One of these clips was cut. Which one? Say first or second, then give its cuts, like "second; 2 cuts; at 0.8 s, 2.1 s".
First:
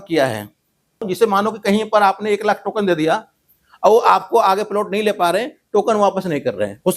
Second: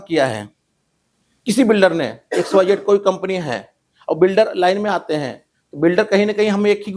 first; 1 cut; at 1.1 s